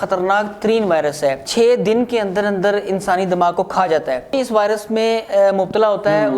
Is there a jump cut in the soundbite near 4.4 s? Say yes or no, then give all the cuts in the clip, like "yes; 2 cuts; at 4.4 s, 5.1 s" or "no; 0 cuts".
yes; 1 cut; at 4.4 s